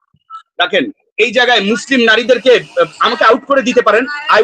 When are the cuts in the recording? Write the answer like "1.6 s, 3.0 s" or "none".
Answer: none